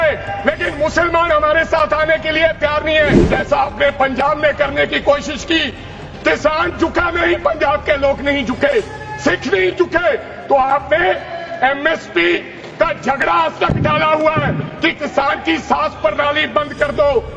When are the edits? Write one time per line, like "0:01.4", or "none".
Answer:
0:03.2